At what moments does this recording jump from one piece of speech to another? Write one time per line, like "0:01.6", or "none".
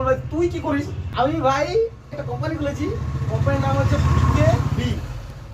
0:01.0
0:02.1